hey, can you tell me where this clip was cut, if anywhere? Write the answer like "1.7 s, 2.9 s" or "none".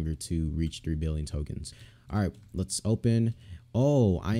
1.7 s